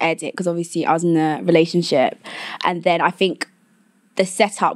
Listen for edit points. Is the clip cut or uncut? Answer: uncut